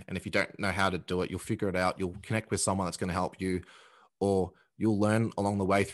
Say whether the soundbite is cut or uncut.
uncut